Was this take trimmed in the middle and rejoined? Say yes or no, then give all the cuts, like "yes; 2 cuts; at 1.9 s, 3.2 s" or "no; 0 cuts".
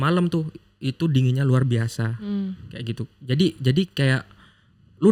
no; 0 cuts